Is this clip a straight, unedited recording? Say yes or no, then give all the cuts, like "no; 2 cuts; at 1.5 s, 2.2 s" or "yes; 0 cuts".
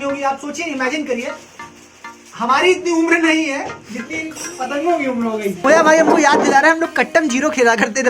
no; 1 cut; at 5.6 s